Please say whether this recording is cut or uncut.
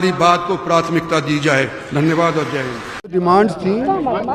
uncut